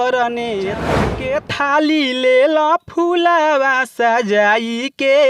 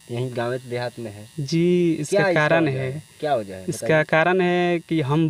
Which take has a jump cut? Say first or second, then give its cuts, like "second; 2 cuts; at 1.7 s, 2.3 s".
first; 1 cut; at 1.1 s